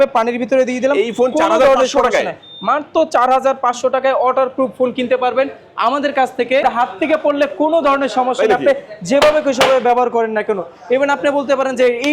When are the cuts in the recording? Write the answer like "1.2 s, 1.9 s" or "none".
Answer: 6.6 s